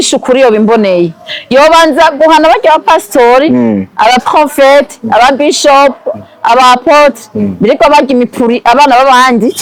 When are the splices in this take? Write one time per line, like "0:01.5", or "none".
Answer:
none